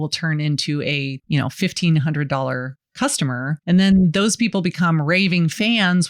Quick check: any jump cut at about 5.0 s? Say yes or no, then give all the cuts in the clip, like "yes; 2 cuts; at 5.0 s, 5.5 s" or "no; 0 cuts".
no; 2 cuts; at 1.2 s, 3.6 s